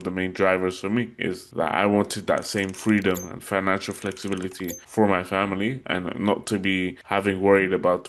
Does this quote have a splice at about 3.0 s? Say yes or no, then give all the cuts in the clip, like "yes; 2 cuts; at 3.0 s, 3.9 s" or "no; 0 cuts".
no; 3 cuts; at 1.4 s, 4.8 s, 7.0 s